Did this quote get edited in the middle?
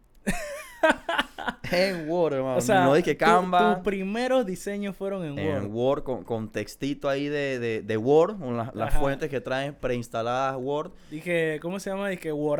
no; 0 cuts

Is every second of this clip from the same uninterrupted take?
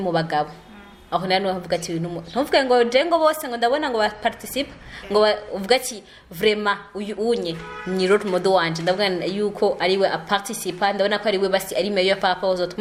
yes; 0 cuts

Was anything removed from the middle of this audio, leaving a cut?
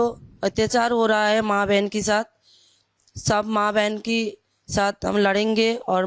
no; 0 cuts

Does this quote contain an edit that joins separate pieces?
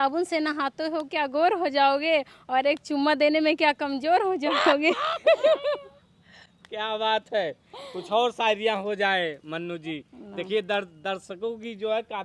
no; 0 cuts

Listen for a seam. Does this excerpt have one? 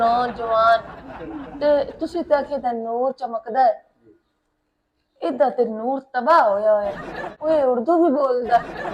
yes; 1 cut; at 7.3 s

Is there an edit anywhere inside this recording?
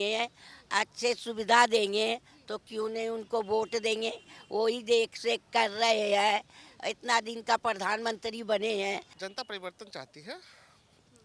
yes; 1 cut; at 9.1 s

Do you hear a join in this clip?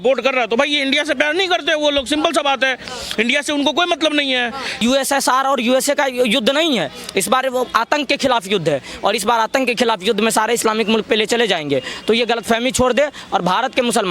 yes; 1 cut; at 4.8 s

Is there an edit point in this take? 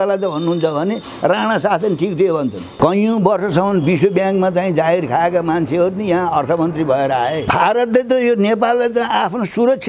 yes; 2 cuts; at 2.7 s, 7.4 s

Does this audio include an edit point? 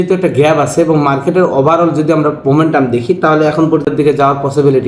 yes; 1 cut; at 3.9 s

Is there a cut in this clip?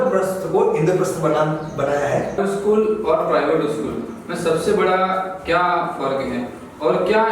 yes; 1 cut; at 2.4 s

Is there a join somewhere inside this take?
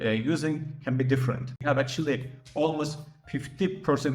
yes; 1 cut; at 1.6 s

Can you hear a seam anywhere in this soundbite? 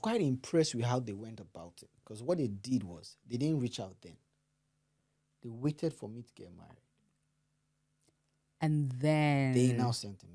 no; 0 cuts

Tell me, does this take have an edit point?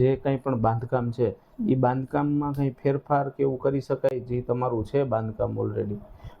no; 0 cuts

